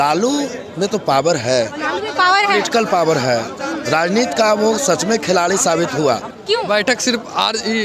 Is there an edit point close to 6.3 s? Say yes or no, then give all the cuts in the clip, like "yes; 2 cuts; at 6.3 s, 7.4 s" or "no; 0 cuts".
yes; 1 cut; at 6.3 s